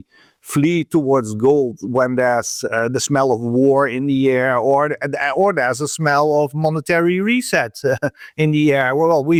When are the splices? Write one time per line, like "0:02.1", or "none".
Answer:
none